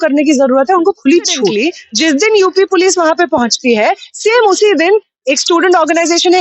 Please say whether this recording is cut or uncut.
cut